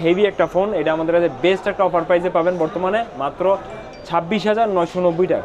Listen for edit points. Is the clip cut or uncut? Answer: uncut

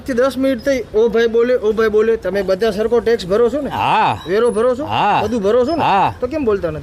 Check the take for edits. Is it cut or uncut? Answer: uncut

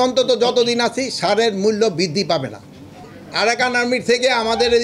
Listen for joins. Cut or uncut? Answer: cut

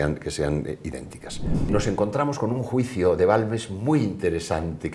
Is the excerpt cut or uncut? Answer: cut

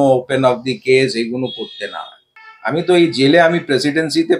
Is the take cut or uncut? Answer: cut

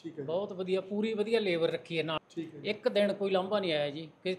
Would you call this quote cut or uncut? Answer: cut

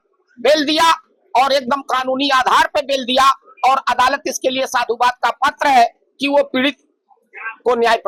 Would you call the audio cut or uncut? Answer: uncut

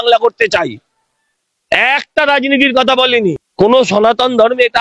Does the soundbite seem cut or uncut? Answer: cut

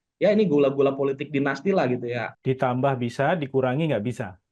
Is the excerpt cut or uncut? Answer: cut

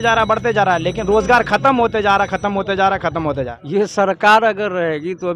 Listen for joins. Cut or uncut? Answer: cut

